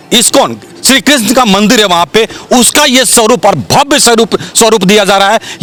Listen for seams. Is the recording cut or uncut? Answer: uncut